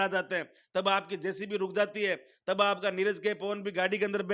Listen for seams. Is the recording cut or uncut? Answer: uncut